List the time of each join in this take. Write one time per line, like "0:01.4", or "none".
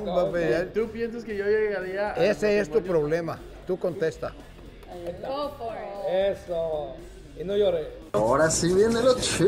none